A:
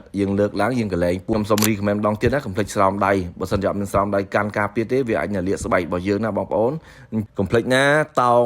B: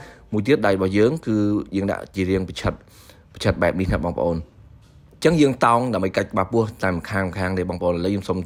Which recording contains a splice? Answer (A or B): A